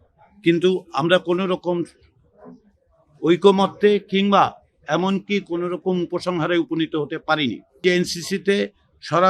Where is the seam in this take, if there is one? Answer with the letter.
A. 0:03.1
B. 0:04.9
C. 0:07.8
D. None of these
C